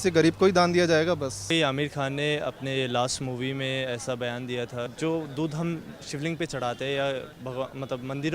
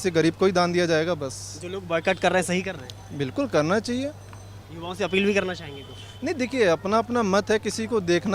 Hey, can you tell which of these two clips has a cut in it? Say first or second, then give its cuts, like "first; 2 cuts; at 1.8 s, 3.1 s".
first; 2 cuts; at 1.5 s, 4.9 s